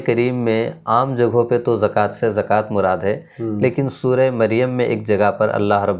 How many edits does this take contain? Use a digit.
0